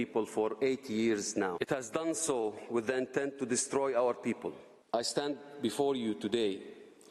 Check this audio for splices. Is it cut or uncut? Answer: cut